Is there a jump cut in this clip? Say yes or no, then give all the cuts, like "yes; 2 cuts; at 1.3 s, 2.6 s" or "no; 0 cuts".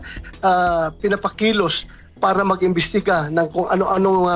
yes; 1 cut; at 1.4 s